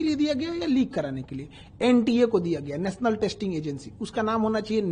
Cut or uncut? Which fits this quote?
uncut